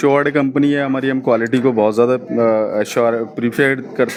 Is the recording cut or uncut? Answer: uncut